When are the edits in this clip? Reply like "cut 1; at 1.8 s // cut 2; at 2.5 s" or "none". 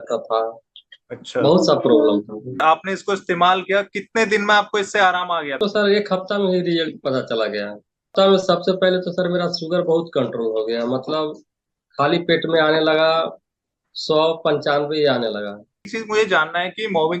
cut 1; at 2.6 s // cut 2; at 5.6 s // cut 3; at 8.1 s // cut 4; at 16.0 s